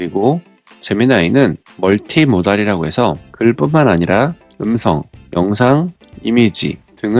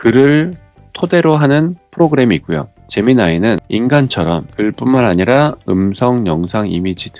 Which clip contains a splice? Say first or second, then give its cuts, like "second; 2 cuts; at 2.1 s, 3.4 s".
second; 2 cuts; at 3.6 s, 4.5 s